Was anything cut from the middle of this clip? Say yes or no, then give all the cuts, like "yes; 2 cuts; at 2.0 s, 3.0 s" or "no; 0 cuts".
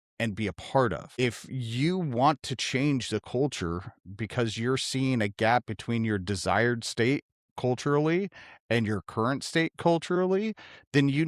yes; 1 cut; at 1.1 s